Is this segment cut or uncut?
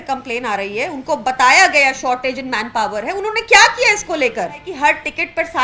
cut